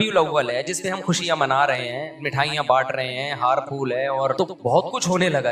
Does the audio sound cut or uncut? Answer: cut